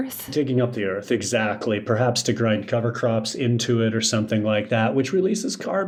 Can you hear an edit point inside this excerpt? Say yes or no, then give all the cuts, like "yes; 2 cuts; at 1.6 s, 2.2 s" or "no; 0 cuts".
no; 0 cuts